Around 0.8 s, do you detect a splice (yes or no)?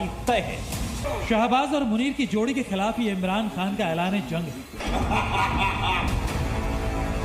no